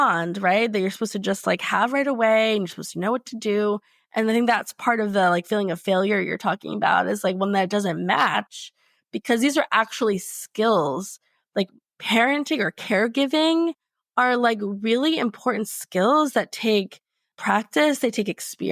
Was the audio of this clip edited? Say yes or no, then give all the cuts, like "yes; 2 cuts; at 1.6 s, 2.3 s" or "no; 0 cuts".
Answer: no; 0 cuts